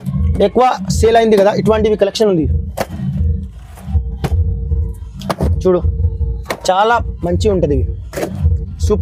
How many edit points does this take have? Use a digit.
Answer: 0